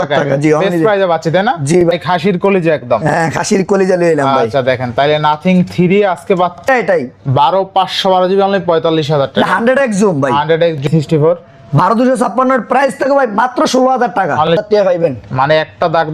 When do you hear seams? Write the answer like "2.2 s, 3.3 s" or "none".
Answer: 1.9 s, 6.6 s, 10.8 s, 14.6 s